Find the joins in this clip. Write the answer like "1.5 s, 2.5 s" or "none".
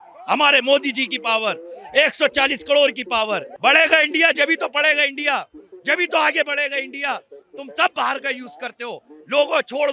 3.5 s